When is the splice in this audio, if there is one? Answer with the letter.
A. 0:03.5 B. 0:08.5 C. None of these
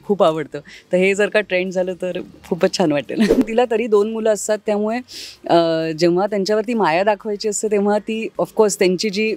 A